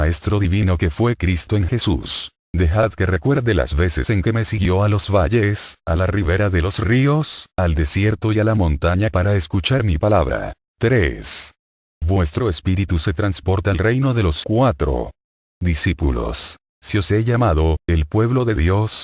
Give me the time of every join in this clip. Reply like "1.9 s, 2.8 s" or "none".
none